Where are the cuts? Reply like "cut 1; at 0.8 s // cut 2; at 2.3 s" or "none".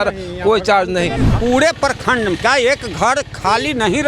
cut 1; at 1.2 s